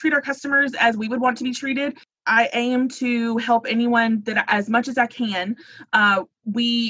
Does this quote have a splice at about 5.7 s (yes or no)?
no